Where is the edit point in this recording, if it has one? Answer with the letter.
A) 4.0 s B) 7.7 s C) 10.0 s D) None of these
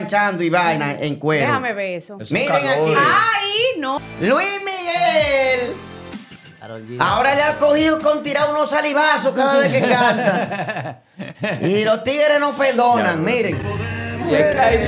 A